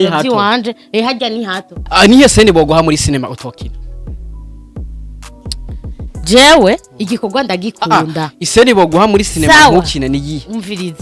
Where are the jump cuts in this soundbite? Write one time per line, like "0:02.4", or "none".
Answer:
0:01.7